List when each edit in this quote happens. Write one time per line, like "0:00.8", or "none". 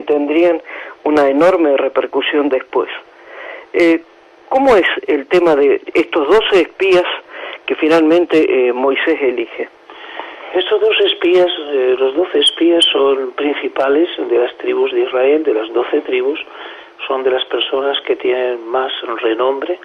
none